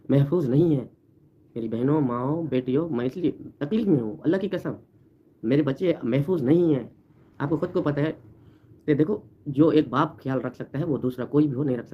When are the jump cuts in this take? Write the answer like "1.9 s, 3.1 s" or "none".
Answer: none